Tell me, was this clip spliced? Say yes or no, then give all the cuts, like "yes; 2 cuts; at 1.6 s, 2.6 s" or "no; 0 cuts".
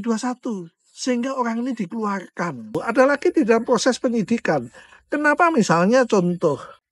yes; 1 cut; at 2.8 s